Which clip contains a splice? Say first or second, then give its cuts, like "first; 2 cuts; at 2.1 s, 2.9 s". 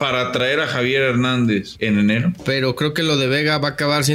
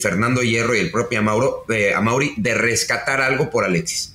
first; 2 cuts; at 1.7 s, 2.4 s